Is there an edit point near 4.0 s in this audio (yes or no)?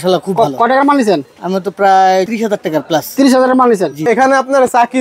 yes